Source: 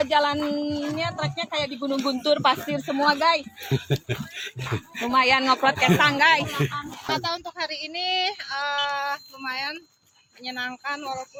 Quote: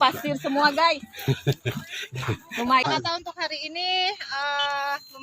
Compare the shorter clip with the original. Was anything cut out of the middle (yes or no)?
yes